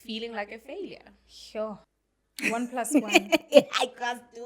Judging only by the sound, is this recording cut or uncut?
cut